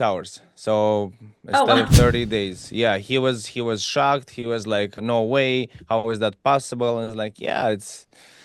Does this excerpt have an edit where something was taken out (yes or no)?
yes